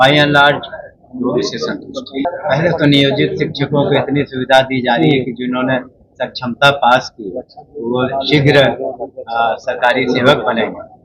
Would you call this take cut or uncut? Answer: cut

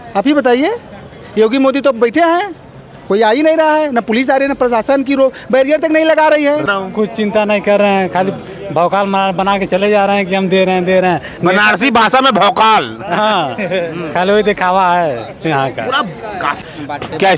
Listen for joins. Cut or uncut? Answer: cut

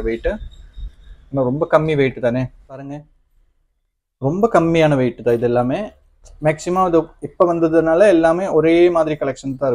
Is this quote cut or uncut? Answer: cut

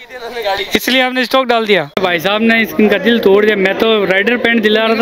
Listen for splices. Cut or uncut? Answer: cut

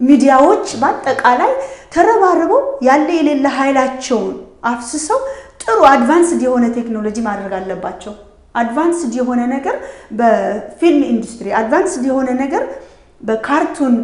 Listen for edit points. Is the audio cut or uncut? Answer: uncut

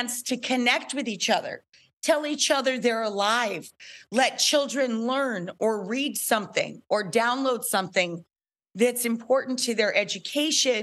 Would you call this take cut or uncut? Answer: uncut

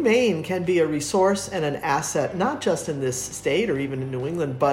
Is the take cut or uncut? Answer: uncut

